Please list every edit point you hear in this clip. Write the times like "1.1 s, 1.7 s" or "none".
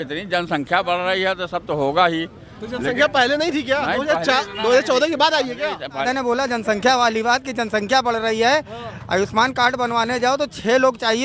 6.0 s